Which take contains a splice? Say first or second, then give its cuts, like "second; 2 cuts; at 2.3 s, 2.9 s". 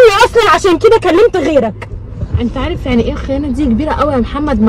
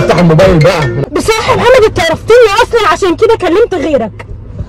second; 1 cut; at 1.1 s